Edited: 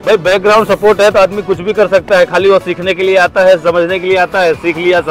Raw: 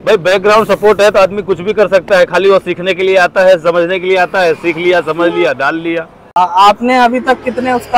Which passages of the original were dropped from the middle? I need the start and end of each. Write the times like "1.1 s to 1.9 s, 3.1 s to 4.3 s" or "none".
none